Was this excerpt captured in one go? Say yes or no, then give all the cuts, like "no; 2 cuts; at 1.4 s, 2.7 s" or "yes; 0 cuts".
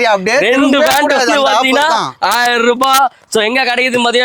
yes; 0 cuts